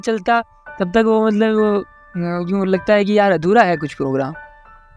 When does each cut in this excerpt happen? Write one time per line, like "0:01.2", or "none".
none